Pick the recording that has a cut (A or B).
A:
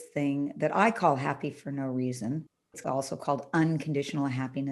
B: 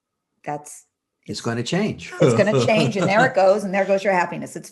A